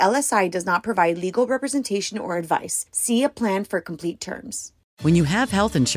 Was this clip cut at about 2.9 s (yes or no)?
no